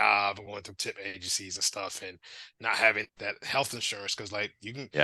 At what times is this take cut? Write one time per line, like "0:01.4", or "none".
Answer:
0:03.1